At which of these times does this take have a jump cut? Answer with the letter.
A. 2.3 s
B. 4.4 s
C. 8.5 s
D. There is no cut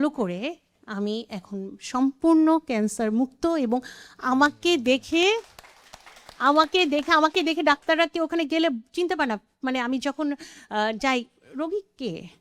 D